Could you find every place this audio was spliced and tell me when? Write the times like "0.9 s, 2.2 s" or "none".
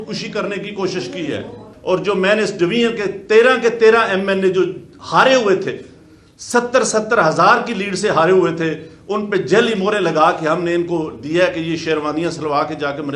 1.7 s